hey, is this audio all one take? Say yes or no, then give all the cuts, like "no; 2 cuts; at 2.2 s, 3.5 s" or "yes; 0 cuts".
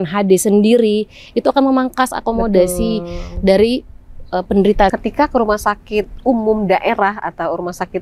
no; 1 cut; at 4.9 s